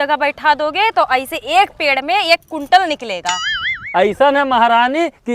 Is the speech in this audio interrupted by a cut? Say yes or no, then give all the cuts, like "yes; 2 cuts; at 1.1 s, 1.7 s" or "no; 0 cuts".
yes; 1 cut; at 3.8 s